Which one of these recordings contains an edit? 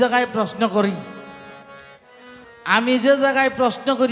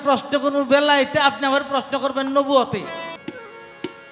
second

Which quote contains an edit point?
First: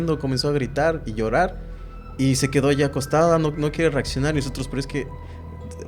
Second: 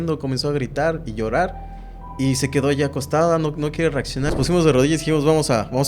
second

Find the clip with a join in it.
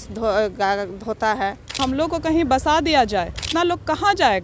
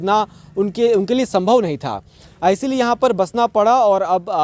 first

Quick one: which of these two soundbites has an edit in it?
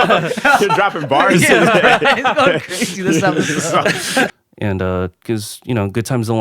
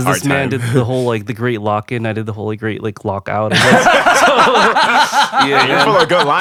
first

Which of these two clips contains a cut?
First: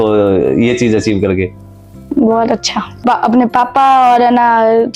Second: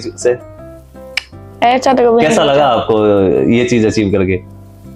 first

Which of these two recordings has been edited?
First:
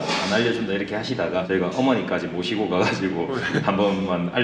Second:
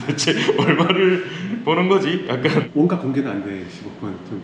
second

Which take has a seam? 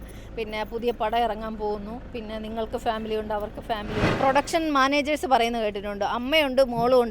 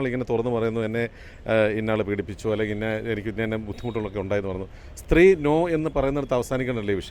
first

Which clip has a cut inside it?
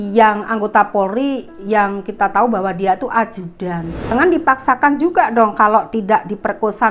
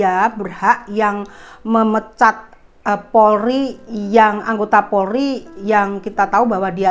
first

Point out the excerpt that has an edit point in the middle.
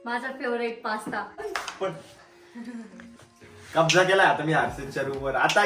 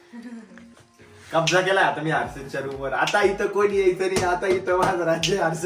first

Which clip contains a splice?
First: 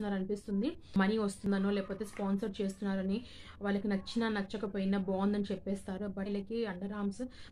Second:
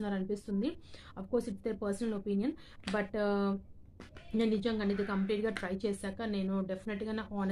first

